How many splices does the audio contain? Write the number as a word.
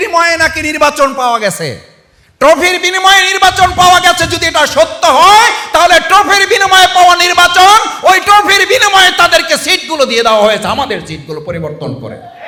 zero